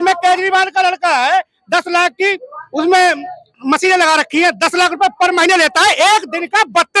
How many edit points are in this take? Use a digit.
0